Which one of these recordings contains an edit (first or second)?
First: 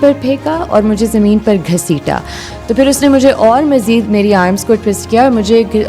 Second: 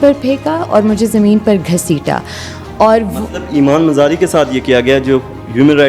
first